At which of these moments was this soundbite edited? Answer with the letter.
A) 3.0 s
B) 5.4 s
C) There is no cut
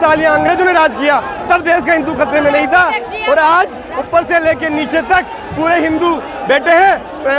C